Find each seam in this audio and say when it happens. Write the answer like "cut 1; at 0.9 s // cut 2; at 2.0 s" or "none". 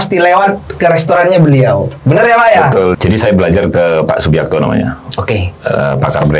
cut 1; at 3.0 s